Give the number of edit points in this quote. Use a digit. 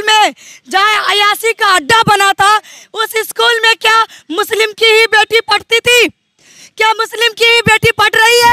0